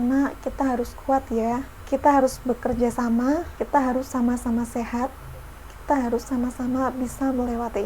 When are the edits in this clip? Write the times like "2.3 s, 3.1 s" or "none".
1.7 s, 3.5 s